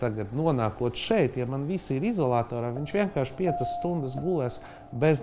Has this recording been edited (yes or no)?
no